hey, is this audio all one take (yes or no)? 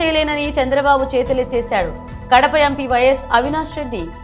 yes